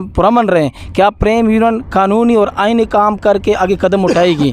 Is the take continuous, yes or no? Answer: yes